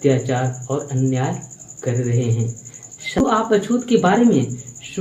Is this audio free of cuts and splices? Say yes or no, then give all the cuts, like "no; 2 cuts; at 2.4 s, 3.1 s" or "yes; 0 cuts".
no; 1 cut; at 3.2 s